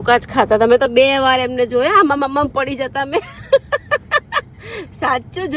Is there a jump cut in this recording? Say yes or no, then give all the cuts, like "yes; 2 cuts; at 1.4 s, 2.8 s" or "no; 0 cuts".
no; 0 cuts